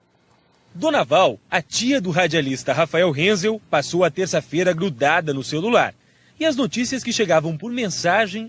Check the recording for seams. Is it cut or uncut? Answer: cut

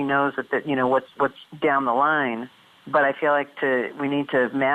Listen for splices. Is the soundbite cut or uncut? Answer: uncut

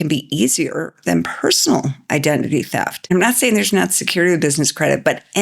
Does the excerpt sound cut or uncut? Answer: cut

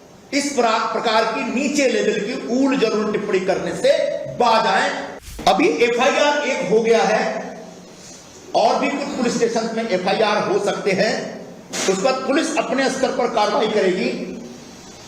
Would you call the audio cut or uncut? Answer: cut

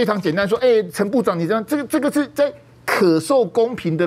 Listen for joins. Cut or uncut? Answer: uncut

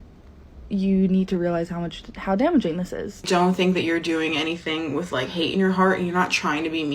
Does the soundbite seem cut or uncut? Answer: cut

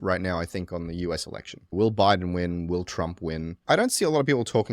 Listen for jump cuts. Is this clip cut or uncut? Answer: cut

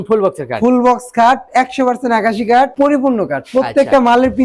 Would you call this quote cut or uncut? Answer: uncut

